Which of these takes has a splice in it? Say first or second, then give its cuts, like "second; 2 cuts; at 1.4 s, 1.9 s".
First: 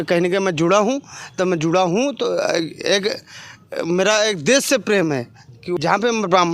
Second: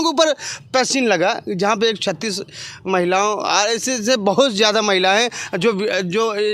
first; 1 cut; at 5.6 s